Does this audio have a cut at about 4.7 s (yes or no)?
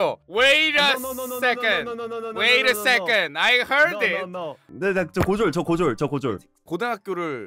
yes